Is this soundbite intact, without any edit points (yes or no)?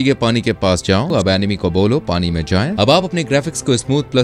no